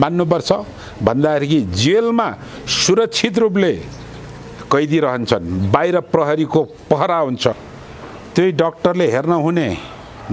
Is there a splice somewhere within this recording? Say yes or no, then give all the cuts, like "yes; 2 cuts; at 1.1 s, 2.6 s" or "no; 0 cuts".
yes; 1 cut; at 7.6 s